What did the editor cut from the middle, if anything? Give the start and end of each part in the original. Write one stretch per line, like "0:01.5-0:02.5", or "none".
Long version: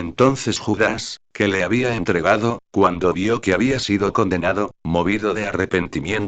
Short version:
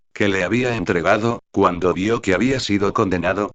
none